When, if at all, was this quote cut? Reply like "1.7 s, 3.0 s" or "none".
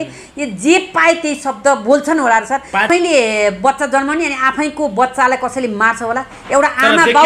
2.9 s